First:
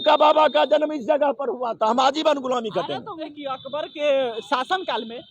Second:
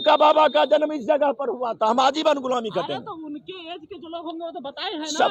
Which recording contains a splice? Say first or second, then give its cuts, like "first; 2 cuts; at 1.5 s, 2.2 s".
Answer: first; 1 cut; at 3.3 s